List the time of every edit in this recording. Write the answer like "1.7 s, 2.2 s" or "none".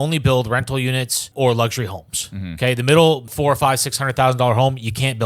1.3 s, 3.3 s

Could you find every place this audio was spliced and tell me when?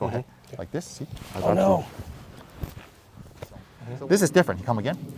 3.8 s

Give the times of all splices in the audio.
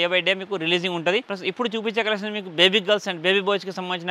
1.3 s

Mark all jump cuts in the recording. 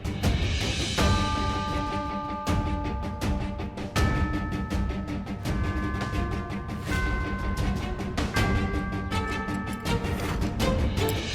5.9 s

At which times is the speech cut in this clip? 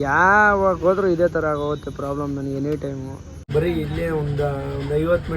3.4 s

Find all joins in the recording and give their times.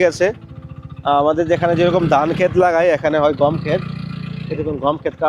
none

